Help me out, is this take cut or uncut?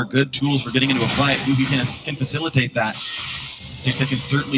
cut